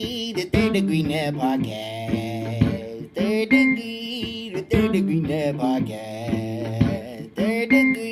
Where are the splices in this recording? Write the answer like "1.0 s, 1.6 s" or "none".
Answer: none